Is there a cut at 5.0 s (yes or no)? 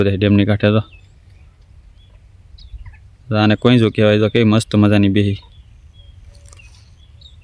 no